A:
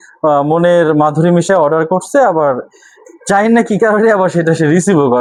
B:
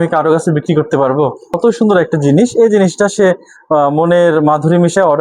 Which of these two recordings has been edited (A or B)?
B